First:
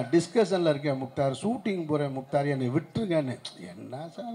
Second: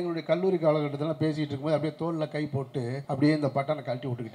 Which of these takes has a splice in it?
second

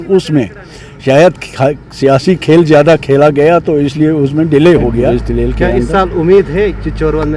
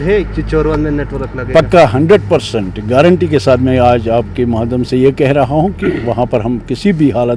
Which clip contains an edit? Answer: first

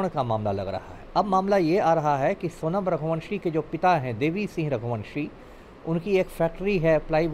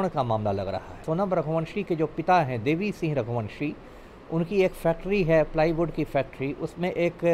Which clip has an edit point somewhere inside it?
second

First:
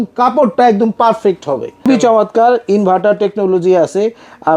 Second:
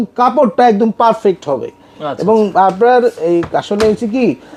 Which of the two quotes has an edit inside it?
first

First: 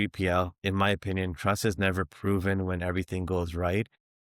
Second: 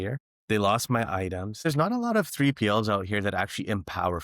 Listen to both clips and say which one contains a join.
second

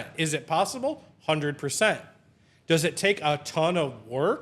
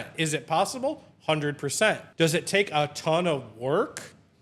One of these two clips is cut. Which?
second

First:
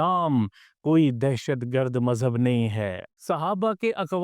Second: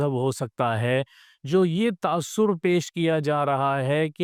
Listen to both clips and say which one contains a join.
first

